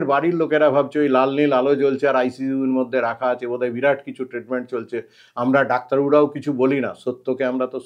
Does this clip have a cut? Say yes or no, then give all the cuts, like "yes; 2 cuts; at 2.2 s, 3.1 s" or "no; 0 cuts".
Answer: no; 0 cuts